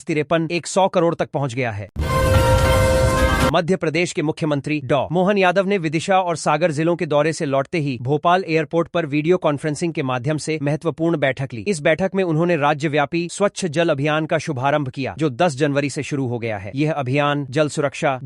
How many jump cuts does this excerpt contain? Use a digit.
2